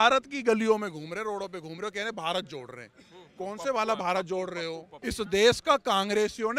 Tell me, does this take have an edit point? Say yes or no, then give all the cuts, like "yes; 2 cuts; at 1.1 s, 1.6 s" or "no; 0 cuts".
no; 0 cuts